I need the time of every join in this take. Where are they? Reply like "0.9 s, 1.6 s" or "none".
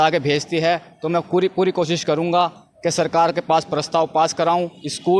none